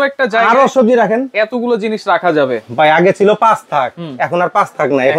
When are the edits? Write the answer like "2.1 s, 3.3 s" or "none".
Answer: none